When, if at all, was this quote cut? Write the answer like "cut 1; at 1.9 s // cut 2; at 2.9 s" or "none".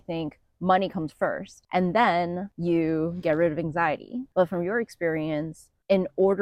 cut 1; at 1.5 s // cut 2; at 2.5 s // cut 3; at 4.2 s